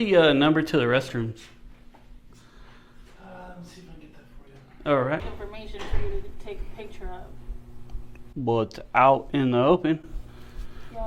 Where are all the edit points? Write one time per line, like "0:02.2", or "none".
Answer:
0:05.2